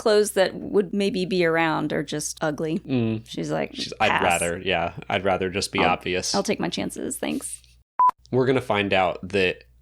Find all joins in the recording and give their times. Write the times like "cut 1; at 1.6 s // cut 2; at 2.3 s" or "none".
cut 1; at 0.9 s // cut 2; at 2.7 s // cut 3; at 7.8 s